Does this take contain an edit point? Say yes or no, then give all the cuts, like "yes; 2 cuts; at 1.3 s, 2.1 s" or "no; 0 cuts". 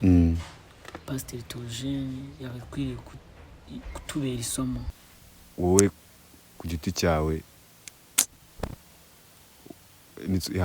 yes; 1 cut; at 4.9 s